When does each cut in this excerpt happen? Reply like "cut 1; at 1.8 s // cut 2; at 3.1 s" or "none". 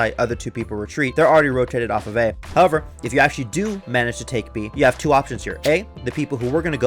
cut 1; at 1.1 s // cut 2; at 2.4 s

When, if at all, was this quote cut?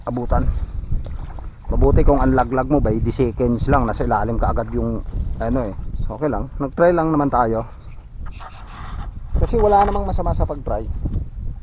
cut 1; at 5.9 s

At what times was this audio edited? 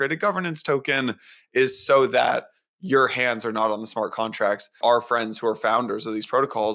cut 1; at 4.7 s

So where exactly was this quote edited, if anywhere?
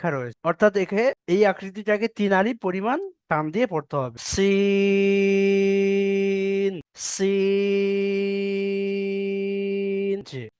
none

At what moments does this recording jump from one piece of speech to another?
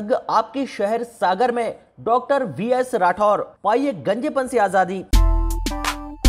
cut 1; at 5.1 s

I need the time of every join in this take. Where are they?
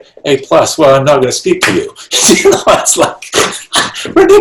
none

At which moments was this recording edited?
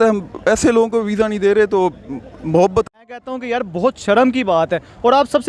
cut 1; at 3.1 s

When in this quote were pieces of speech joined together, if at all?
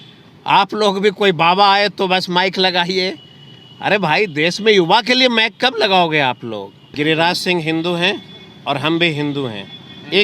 cut 1; at 6.8 s

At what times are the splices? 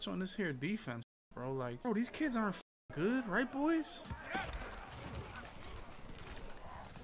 none

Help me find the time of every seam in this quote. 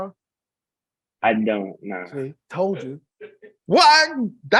none

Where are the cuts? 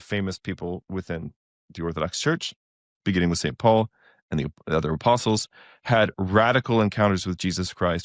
none

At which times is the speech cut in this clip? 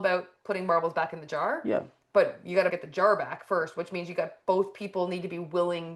cut 1; at 2.8 s

